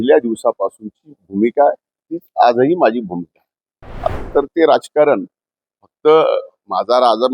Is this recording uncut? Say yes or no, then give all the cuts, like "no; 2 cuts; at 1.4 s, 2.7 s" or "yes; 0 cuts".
no; 1 cut; at 4.1 s